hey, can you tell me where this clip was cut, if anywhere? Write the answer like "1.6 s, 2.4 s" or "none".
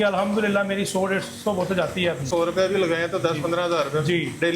2.3 s